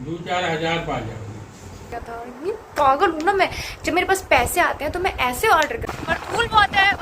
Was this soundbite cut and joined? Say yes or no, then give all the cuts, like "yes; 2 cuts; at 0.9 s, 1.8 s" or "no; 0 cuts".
yes; 2 cuts; at 1.9 s, 5.9 s